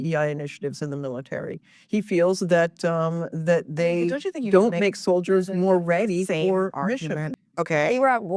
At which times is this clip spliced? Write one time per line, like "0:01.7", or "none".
0:07.3